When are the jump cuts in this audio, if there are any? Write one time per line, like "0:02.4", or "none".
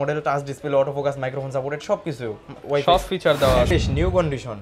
0:03.7